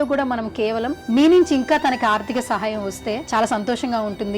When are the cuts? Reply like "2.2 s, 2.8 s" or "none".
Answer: 1.0 s, 3.2 s